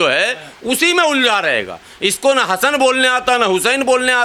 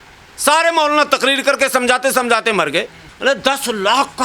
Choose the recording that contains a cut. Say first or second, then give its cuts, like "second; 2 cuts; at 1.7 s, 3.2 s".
second; 1 cut; at 3.0 s